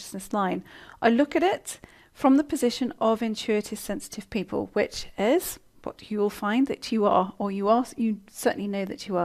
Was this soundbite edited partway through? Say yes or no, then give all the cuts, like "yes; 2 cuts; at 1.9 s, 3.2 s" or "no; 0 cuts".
yes; 1 cut; at 1.5 s